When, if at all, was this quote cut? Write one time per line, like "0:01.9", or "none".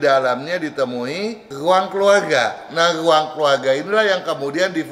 0:01.5

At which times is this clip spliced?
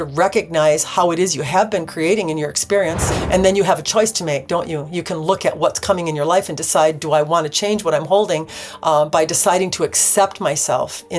0:03.1

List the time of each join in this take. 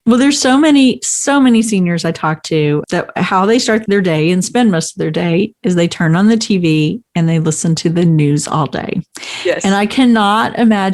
0:02.8
0:03.8

